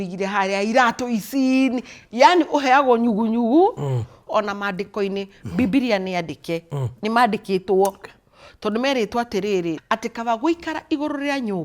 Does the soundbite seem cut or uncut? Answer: cut